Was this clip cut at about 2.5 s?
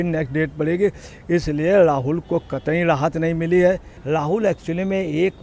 no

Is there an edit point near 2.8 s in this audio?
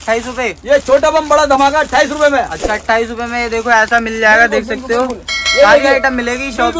no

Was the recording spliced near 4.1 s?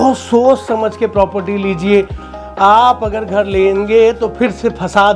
no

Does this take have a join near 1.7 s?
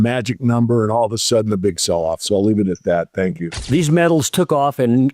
no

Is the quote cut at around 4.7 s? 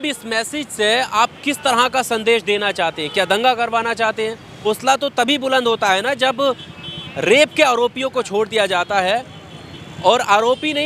yes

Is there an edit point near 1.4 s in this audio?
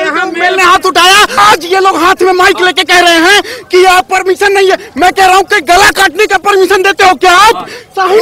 yes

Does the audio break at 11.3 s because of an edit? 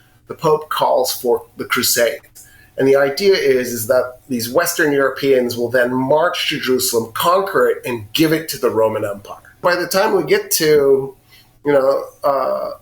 no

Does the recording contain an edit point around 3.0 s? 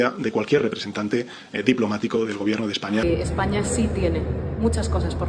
yes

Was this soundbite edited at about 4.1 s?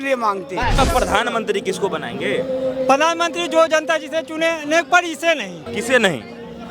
no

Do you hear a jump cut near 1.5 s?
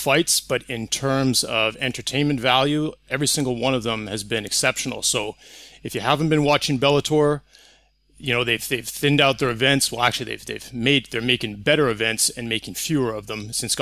yes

